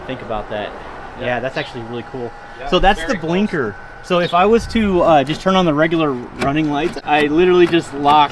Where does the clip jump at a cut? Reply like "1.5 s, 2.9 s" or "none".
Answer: 7.0 s